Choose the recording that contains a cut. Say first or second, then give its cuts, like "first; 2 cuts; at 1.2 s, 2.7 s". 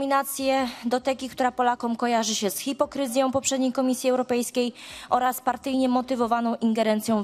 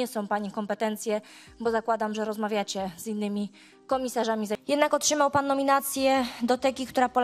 second; 1 cut; at 4.6 s